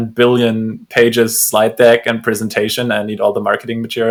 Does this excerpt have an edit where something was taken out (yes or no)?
no